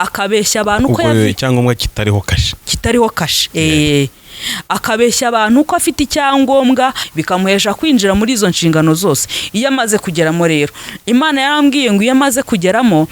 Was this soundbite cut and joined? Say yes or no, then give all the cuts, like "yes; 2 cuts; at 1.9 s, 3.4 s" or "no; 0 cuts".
yes; 1 cut; at 7.0 s